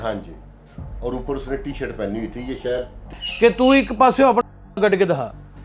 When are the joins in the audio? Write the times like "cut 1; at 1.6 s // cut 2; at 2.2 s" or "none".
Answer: cut 1; at 3.2 s